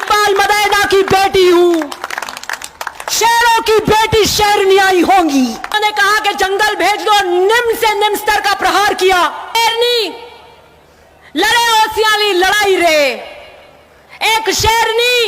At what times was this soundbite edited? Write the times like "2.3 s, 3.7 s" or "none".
5.8 s, 9.6 s